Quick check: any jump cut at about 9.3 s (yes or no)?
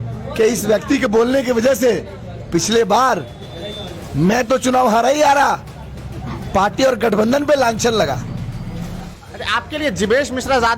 yes